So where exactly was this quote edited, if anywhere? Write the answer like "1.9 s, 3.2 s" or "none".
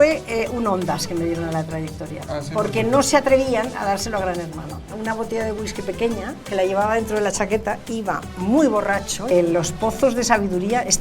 4.9 s, 9.3 s